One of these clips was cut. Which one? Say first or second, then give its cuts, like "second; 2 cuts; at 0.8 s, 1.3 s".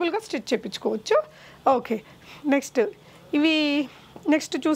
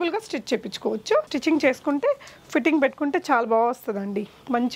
second; 1 cut; at 1.3 s